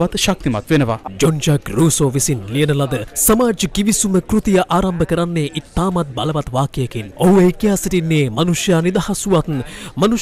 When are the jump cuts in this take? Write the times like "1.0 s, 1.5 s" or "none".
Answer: 1.1 s